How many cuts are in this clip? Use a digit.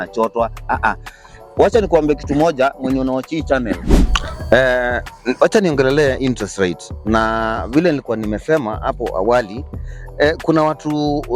1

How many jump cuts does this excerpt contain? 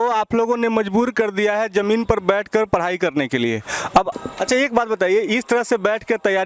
1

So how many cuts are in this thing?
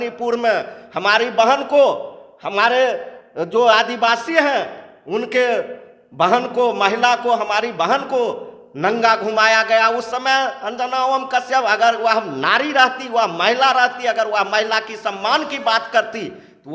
0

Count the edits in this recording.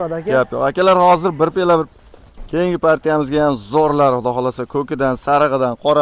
1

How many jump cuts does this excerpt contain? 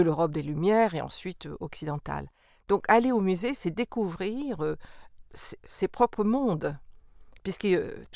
0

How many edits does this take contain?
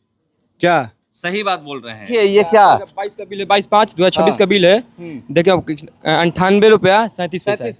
1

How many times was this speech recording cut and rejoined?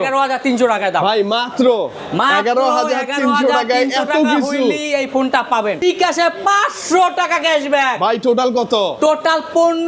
1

